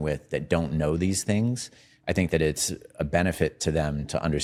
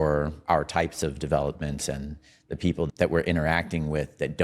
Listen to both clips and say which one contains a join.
second; 1 cut; at 2.9 s

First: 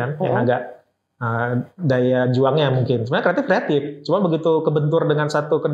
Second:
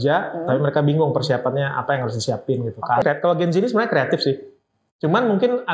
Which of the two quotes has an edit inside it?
second; 1 cut; at 3.0 s

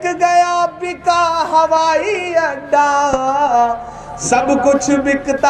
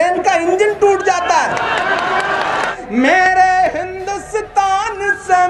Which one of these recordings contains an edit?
second; 1 cut; at 2.7 s

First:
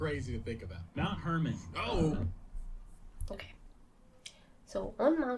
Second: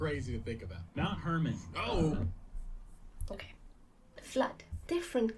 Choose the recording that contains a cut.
second; 1 cut; at 4.2 s

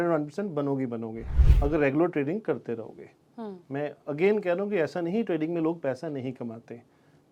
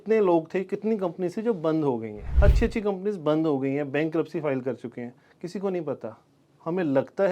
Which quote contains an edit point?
second; 1 cut; at 2.2 s

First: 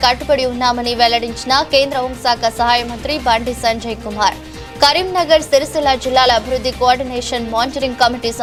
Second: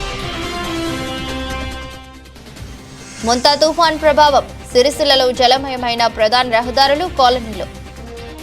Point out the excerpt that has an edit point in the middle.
second; 2 cuts; at 2.2 s, 7.7 s

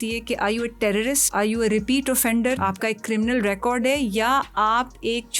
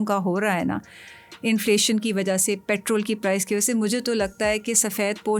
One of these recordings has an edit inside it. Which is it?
first; 2 cuts; at 1.2 s, 2.6 s

